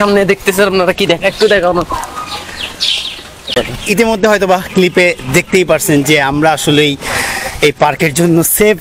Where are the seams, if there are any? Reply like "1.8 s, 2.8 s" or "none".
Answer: 3.4 s